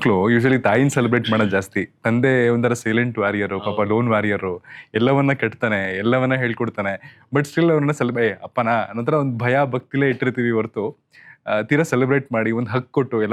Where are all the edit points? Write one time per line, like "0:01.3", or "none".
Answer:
none